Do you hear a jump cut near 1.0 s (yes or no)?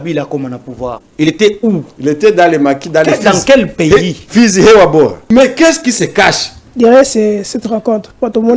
yes